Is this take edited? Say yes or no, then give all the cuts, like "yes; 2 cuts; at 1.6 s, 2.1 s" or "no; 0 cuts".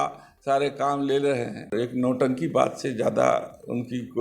yes; 1 cut; at 1.7 s